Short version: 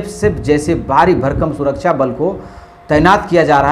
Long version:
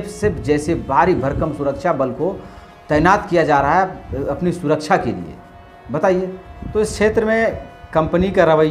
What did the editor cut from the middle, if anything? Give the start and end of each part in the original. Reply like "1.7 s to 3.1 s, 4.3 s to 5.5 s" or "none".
none